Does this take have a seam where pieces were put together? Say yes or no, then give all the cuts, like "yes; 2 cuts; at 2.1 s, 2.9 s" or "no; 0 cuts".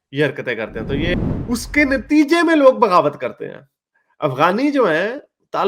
yes; 1 cut; at 1.1 s